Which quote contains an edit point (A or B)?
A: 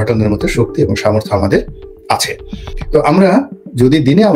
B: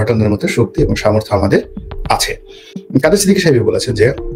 B